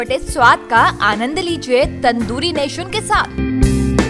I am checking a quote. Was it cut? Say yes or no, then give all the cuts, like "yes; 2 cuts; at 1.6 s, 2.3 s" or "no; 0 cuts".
no; 0 cuts